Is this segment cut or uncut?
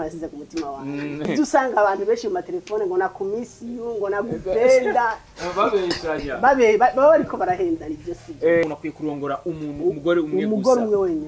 cut